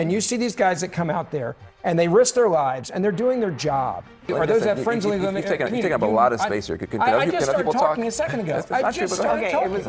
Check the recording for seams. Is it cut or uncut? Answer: cut